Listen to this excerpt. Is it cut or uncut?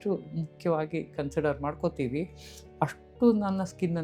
uncut